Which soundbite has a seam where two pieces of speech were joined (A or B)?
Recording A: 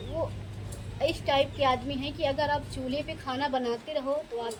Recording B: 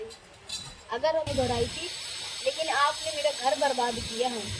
B